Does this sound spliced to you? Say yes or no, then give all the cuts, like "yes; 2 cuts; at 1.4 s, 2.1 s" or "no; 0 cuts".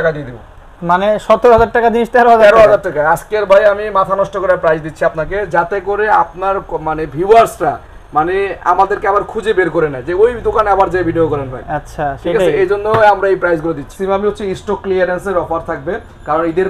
yes; 1 cut; at 13.9 s